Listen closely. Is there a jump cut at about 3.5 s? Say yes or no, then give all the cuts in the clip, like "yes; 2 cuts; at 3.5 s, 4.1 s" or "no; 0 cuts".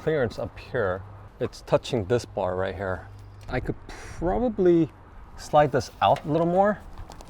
yes; 2 cuts; at 1.2 s, 3.5 s